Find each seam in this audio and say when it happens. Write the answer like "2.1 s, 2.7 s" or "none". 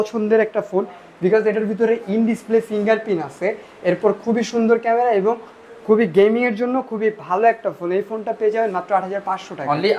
none